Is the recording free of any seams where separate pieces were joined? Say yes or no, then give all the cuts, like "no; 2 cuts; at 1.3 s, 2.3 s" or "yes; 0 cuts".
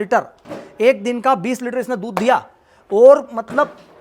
yes; 0 cuts